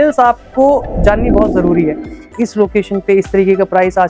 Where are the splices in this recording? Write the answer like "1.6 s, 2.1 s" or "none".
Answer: 2.3 s